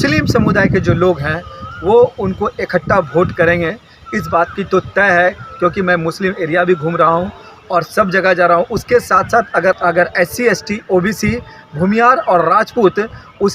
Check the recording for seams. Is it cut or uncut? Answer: cut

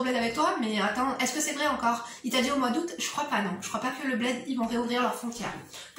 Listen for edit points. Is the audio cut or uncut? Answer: uncut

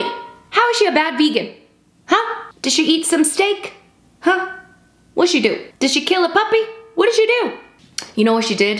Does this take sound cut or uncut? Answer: uncut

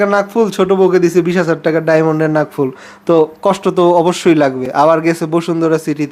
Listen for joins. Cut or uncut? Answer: uncut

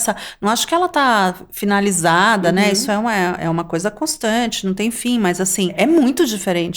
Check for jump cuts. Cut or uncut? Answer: cut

